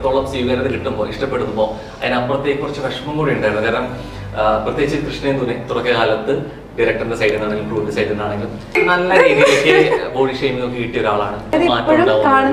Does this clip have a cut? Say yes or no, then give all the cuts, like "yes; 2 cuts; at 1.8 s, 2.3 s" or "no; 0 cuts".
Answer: yes; 2 cuts; at 8.8 s, 11.5 s